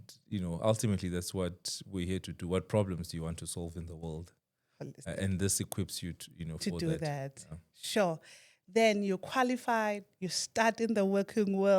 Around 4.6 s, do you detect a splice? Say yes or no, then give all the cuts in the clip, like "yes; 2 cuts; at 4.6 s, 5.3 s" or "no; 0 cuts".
no; 0 cuts